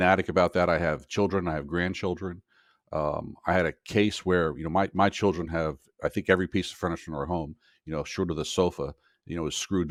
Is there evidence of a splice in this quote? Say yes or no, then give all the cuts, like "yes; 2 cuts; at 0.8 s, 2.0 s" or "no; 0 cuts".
no; 0 cuts